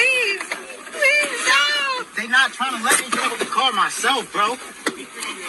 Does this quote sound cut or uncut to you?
cut